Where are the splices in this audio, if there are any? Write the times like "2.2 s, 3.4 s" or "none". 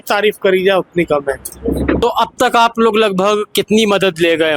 2.0 s